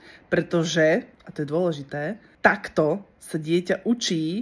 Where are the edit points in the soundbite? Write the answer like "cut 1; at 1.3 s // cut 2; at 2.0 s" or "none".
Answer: cut 1; at 1.2 s // cut 2; at 2.2 s